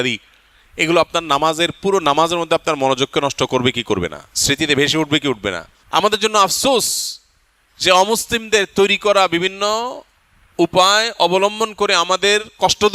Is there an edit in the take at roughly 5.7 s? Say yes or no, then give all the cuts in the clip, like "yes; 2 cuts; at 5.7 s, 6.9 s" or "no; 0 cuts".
yes; 1 cut; at 5.7 s